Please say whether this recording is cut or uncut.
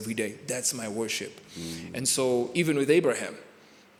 uncut